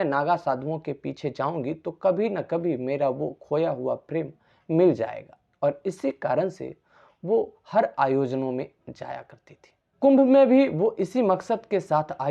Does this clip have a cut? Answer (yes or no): no